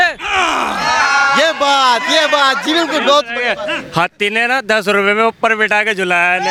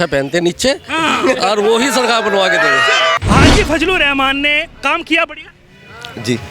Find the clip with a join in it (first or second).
second